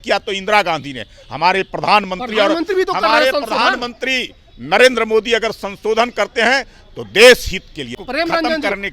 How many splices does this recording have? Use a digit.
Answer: 1